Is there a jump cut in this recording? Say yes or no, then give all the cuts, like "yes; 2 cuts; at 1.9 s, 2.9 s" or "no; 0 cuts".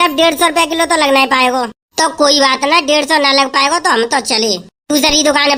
no; 0 cuts